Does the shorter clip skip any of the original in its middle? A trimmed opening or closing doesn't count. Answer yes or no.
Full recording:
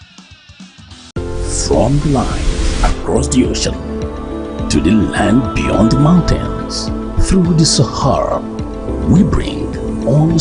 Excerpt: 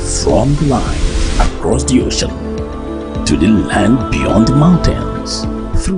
no